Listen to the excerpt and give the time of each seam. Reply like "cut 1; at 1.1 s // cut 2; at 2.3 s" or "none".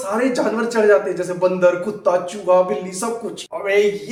none